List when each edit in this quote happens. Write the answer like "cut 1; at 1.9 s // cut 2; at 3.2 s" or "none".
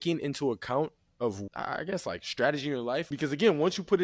cut 1; at 1.4 s // cut 2; at 3.1 s

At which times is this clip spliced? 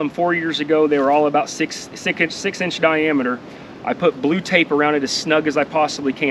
none

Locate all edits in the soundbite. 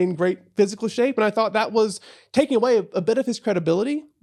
none

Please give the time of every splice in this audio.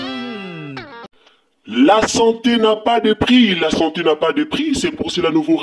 cut 1; at 1.0 s

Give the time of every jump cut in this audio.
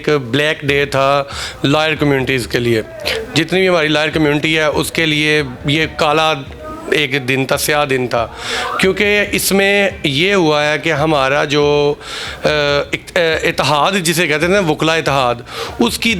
none

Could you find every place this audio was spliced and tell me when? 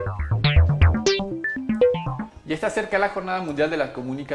cut 1; at 2.2 s

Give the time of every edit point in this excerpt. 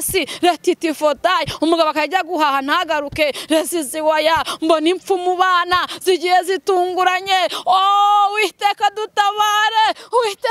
none

